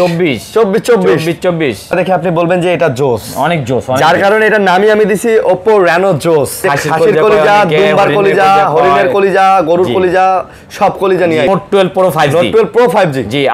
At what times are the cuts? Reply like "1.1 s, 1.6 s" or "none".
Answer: 1.9 s, 6.6 s, 11.5 s